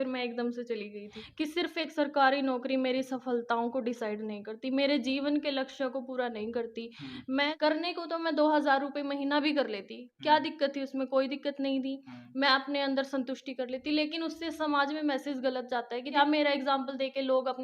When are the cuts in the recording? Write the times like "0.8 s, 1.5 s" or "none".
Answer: 1.2 s, 7.5 s, 16.1 s